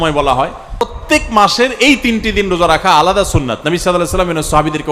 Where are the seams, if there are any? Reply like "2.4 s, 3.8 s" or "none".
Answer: 1.0 s